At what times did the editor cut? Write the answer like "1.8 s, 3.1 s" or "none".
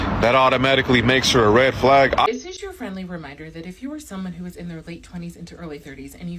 2.3 s